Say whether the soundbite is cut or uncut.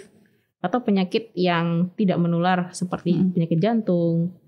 uncut